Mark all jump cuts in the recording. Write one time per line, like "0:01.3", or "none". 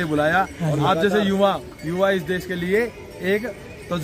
none